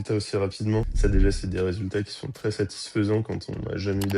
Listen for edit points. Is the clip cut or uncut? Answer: cut